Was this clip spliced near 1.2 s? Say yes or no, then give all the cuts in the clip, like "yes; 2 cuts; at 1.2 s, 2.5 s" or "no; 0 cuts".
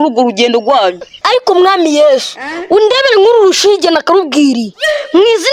yes; 1 cut; at 1.2 s